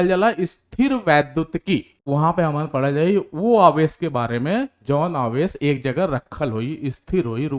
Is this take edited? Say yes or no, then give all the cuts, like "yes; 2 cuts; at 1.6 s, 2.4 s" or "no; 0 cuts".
yes; 1 cut; at 1.9 s